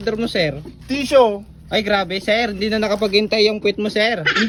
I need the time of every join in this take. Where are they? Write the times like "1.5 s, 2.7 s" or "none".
none